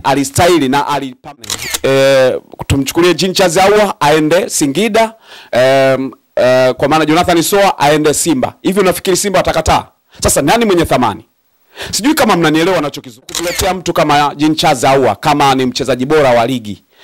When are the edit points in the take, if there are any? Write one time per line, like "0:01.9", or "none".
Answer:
0:01.4
0:13.3